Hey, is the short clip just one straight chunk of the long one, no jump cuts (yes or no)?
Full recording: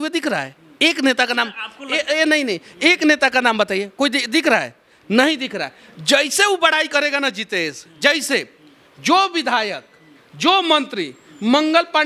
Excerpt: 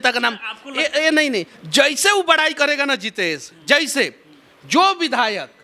no